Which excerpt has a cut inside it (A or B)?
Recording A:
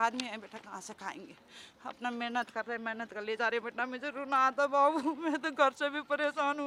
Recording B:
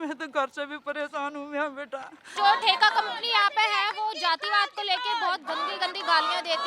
B